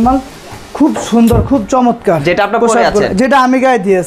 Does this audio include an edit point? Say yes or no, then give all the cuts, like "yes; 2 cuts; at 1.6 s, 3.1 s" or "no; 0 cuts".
no; 0 cuts